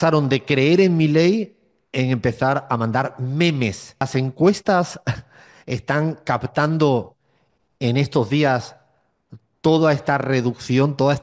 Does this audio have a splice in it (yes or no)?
yes